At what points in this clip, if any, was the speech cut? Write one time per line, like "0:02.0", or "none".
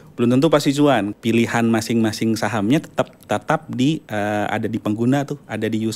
0:01.1